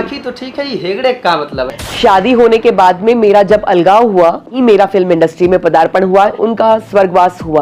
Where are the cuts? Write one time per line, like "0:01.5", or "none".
0:01.7
0:04.5
0:06.3